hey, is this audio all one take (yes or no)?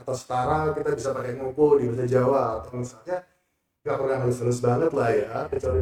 yes